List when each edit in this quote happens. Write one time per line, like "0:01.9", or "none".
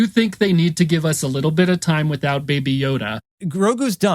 0:03.2

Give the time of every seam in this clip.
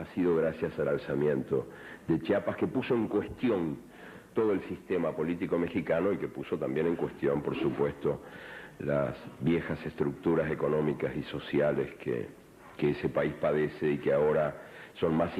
none

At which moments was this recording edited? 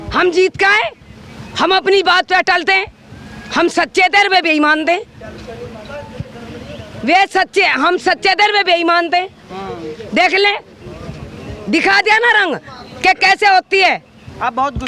none

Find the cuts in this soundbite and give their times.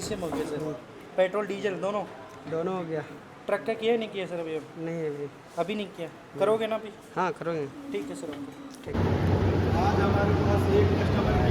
0:08.9

